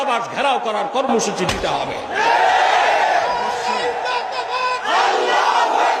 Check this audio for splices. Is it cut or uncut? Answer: uncut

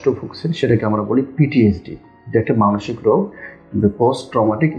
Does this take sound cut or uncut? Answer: uncut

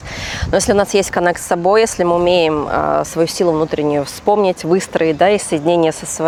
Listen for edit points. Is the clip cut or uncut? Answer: uncut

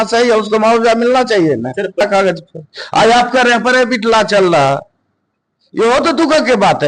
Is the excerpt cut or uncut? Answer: cut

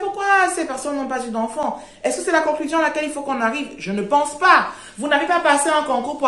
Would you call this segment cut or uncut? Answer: uncut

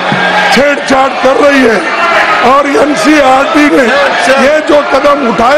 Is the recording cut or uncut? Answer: uncut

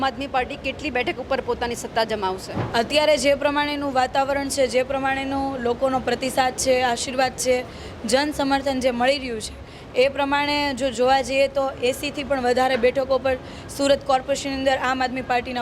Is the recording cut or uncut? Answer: cut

